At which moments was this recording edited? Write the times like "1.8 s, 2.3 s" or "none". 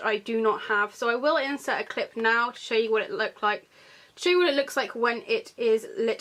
none